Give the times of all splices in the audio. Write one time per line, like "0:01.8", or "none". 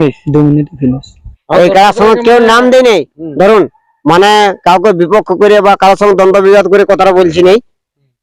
0:01.4